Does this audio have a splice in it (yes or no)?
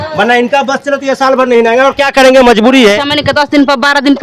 yes